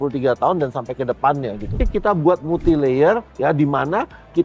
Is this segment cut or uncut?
cut